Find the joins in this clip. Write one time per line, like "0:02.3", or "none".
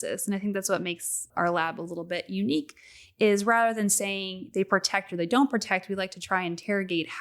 0:01.3